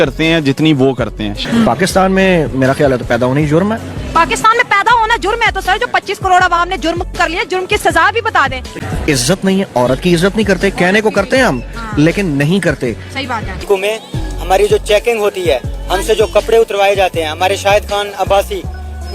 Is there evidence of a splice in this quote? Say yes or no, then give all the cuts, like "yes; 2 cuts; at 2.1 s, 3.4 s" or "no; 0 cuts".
yes; 3 cuts; at 1.3 s, 8.7 s, 13.5 s